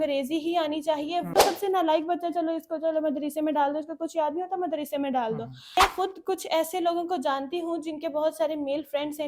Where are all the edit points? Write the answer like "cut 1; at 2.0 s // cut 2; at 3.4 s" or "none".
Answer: cut 1; at 1.3 s // cut 2; at 5.8 s